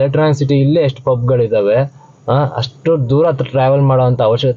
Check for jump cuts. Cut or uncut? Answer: uncut